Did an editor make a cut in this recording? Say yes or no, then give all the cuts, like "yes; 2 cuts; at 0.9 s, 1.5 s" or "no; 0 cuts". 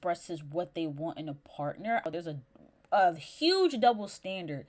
yes; 1 cut; at 2.1 s